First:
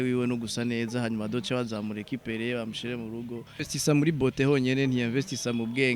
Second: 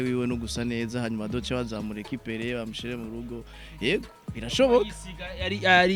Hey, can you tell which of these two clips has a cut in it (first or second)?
first